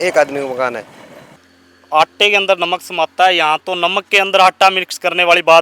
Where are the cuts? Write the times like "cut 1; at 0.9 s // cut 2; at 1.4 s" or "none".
none

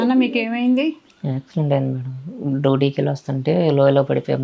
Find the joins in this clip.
cut 1; at 1.1 s

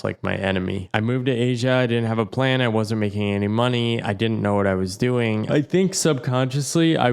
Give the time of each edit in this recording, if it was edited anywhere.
cut 1; at 0.8 s // cut 2; at 5.4 s

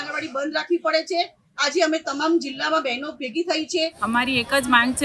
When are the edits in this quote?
cut 1; at 4.0 s

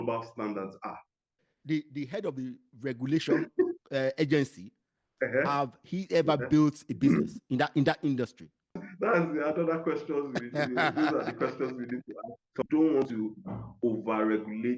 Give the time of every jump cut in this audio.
cut 1; at 8.8 s // cut 2; at 12.6 s

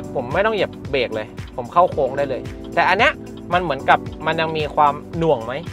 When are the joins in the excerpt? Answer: none

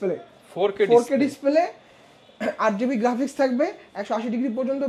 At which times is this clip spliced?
none

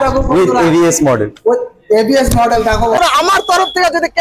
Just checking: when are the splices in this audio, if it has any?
cut 1; at 3.0 s

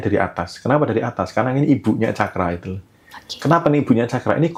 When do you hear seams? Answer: none

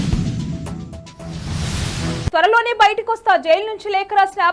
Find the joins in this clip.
cut 1; at 2.3 s

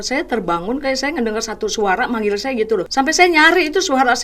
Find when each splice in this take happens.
cut 1; at 2.9 s

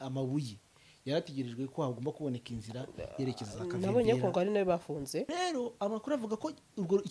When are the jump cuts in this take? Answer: cut 1; at 5.3 s

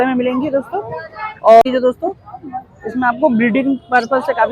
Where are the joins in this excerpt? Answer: cut 1; at 1.6 s

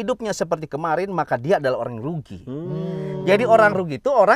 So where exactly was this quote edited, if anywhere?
none

